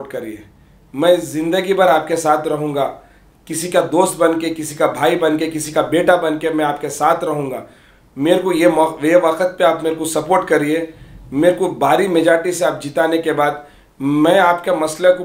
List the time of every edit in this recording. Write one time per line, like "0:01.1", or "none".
none